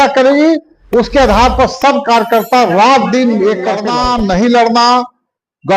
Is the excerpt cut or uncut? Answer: cut